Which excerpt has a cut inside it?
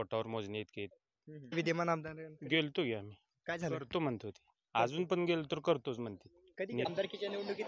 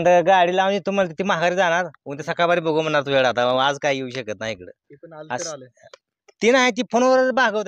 first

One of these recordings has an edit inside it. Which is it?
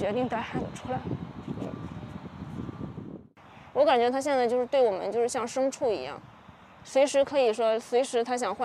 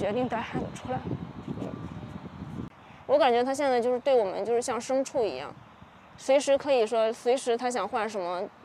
second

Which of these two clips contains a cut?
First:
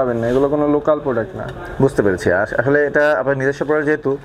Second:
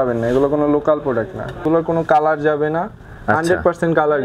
second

